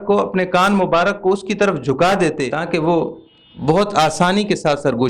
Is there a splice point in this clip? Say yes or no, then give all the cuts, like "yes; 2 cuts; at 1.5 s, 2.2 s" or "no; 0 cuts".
yes; 1 cut; at 2.5 s